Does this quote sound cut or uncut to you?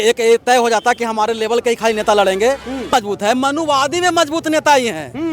cut